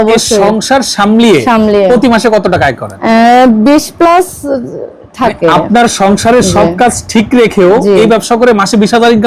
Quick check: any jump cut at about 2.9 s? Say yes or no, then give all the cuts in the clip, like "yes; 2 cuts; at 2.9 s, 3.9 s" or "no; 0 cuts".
yes; 1 cut; at 2.9 s